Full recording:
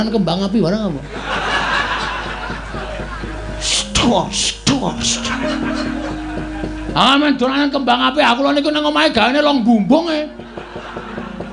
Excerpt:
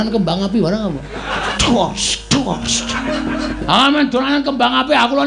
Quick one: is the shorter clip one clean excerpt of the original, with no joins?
no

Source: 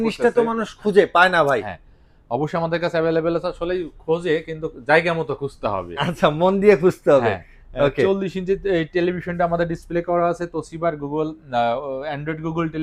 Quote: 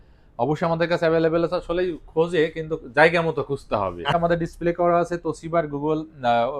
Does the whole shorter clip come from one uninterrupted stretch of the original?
no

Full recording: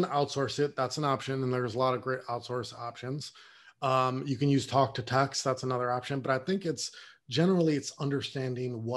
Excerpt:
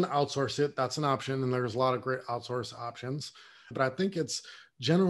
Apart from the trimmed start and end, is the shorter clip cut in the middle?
yes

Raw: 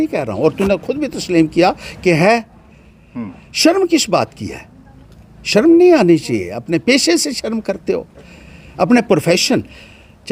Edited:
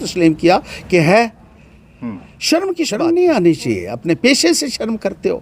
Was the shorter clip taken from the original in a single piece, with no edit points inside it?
no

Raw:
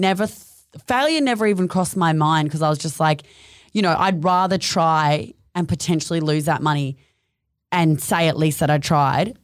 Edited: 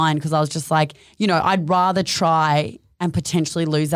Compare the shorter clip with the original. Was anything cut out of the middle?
yes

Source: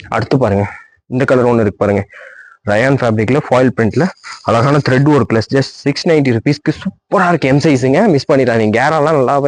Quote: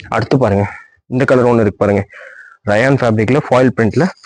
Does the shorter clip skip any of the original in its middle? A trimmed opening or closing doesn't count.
no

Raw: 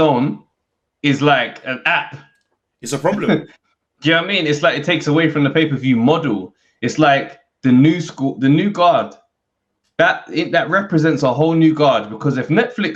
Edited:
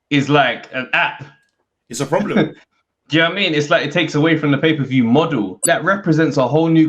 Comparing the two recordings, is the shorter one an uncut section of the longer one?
no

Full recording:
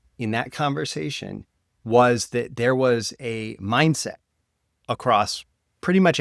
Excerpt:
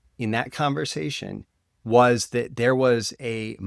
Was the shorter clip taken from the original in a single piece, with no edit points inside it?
yes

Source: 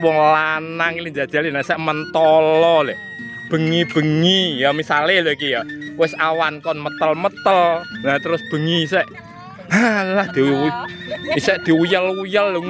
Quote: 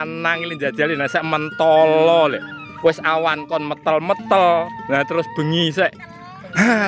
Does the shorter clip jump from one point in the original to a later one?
yes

